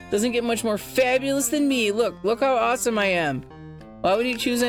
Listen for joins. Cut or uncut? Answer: uncut